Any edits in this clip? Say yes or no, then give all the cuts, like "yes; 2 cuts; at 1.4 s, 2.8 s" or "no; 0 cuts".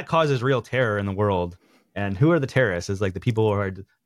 no; 0 cuts